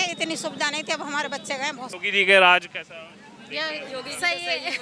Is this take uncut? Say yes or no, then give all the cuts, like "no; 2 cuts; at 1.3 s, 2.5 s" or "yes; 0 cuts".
no; 1 cut; at 1.9 s